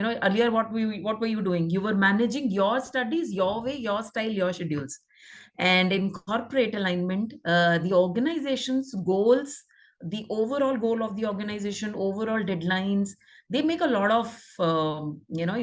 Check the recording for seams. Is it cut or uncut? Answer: uncut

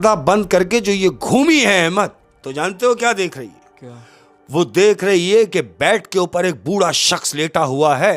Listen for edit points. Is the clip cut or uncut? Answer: uncut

